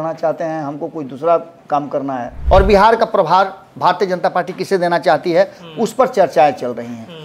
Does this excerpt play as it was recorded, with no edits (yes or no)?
no